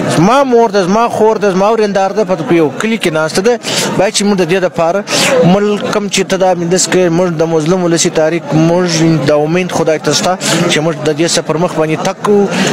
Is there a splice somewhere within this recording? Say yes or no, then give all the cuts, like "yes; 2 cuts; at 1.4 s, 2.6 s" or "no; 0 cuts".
no; 0 cuts